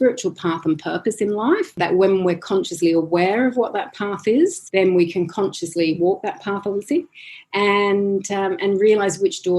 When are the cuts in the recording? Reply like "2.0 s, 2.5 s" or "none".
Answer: 1.8 s, 4.6 s